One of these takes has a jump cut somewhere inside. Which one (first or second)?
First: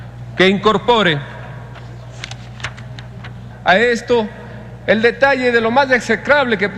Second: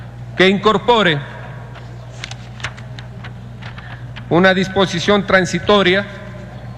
second